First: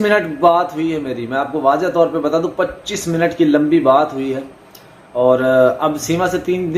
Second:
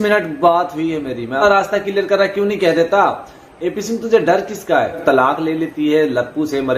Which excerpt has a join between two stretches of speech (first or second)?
second